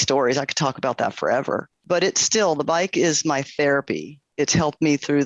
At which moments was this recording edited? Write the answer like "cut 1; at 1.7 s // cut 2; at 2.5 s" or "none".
cut 1; at 1.7 s // cut 2; at 4.3 s